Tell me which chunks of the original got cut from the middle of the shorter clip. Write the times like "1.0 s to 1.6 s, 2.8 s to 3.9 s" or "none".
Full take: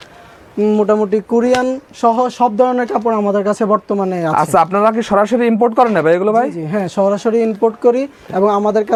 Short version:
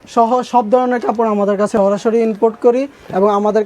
3.6 s to 6.9 s